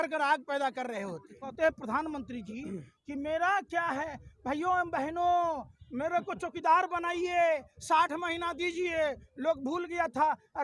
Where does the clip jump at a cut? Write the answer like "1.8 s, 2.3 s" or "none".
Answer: 1.5 s